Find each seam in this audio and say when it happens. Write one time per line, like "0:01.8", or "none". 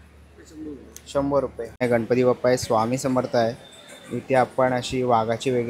0:01.8